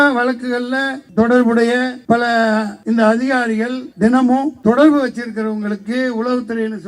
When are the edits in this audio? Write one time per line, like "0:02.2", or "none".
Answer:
0:01.0
0:02.3
0:04.0